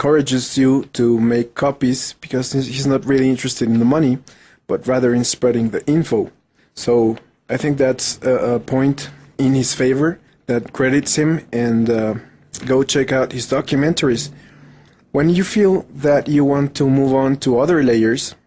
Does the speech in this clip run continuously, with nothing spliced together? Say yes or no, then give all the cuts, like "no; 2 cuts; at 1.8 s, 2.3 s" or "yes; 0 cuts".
yes; 0 cuts